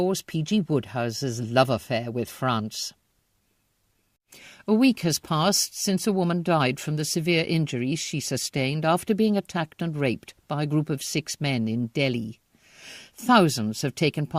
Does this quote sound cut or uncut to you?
cut